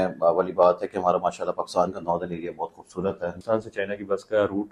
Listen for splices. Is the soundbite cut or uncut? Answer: cut